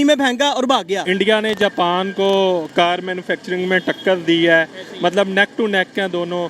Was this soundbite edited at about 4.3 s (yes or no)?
no